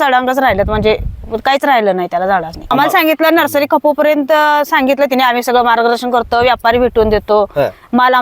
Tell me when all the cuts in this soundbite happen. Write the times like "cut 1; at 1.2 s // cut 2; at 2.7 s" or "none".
cut 1; at 2.6 s